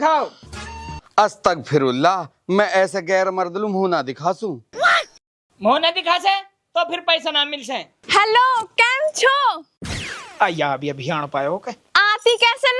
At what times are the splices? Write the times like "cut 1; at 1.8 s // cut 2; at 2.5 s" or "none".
cut 1; at 7.9 s